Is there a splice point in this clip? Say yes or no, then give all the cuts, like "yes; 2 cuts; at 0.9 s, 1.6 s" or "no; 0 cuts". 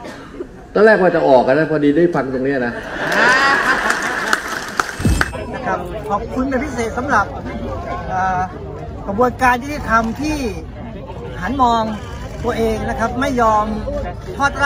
yes; 1 cut; at 5.3 s